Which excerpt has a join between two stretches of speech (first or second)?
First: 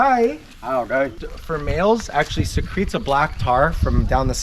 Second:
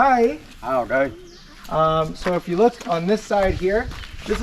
first